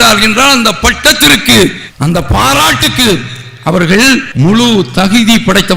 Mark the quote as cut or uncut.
cut